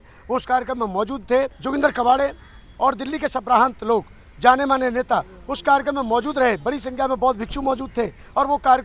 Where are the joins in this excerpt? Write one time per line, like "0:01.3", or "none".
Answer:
0:01.6